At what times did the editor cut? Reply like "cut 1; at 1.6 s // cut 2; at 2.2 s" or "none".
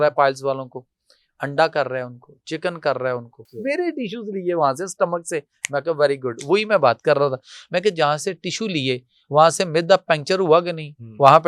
cut 1; at 3.5 s